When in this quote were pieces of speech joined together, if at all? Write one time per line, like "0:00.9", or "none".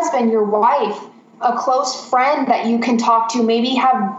none